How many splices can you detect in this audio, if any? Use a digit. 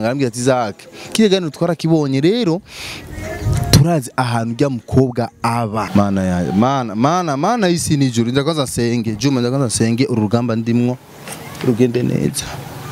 1